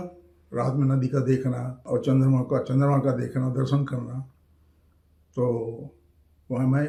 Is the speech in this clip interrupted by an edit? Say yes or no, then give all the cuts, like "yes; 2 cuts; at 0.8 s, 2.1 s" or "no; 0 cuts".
no; 0 cuts